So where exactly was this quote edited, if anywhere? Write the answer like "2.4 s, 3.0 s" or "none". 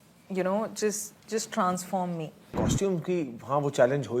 2.5 s